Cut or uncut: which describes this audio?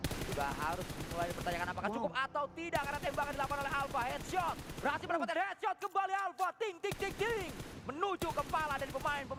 uncut